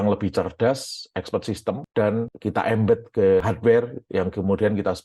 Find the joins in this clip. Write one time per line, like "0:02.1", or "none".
0:03.4